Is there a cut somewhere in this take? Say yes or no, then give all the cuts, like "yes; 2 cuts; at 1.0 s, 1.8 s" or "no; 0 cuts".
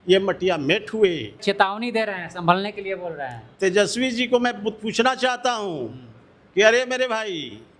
yes; 2 cuts; at 1.3 s, 3.4 s